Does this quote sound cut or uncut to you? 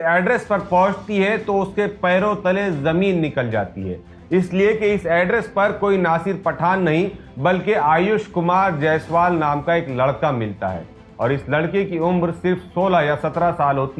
uncut